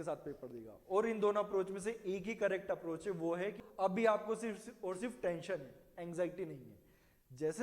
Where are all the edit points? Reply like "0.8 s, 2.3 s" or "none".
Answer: 3.6 s